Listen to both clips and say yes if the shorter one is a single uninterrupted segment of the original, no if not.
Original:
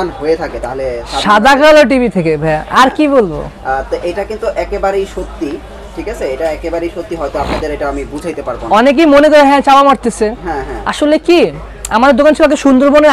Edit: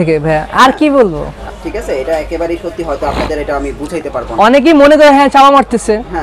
no